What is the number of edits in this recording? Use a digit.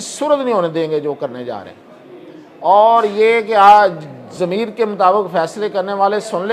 0